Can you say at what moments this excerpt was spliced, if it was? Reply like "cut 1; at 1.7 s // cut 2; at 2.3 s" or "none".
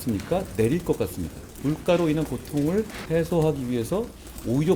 cut 1; at 1.5 s // cut 2; at 3.0 s